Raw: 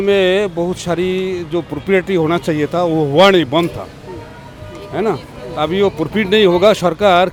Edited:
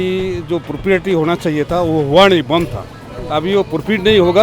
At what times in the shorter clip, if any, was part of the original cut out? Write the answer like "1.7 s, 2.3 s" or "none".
3.1 s